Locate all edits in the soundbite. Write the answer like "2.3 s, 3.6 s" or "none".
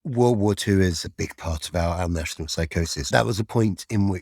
1.0 s, 3.1 s